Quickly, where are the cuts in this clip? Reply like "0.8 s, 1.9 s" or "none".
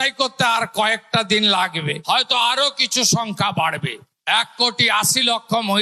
none